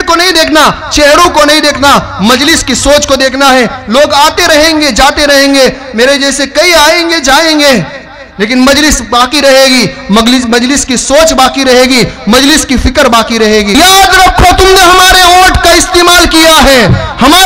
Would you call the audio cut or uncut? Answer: cut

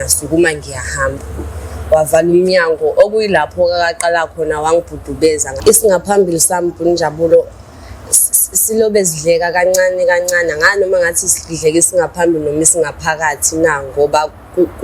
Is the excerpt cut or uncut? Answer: cut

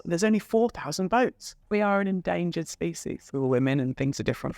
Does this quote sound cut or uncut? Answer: cut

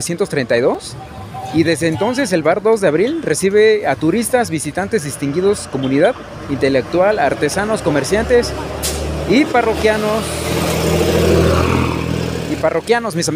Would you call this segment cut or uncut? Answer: uncut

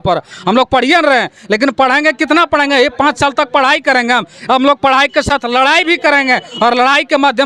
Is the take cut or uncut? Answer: uncut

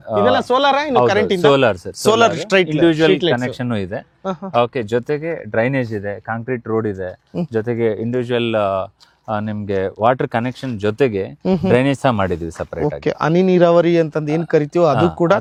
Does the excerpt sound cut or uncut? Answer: uncut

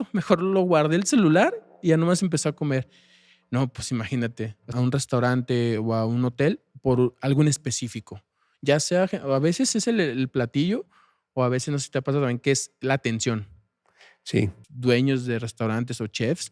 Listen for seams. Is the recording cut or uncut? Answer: cut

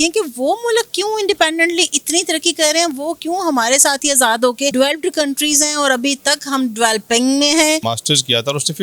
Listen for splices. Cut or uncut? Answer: cut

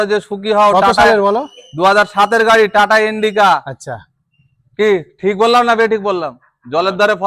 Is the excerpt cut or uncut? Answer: uncut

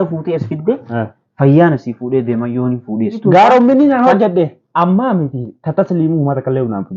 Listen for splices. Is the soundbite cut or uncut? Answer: cut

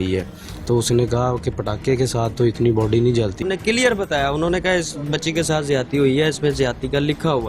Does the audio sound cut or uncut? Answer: cut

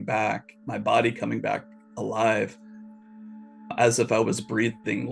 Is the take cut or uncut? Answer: uncut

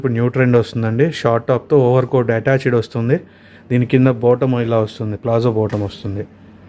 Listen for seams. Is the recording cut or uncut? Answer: uncut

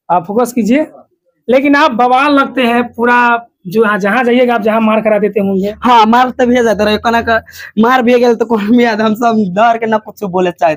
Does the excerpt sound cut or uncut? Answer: uncut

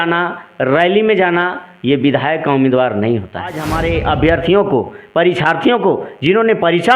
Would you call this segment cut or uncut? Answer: cut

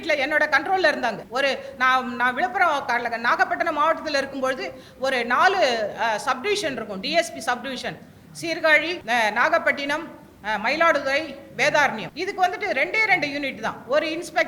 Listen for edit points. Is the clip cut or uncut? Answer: cut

